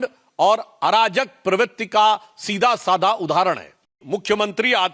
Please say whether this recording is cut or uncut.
cut